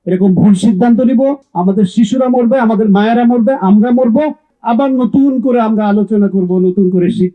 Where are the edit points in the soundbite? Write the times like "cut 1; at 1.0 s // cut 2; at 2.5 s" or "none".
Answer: cut 1; at 1.5 s // cut 2; at 4.5 s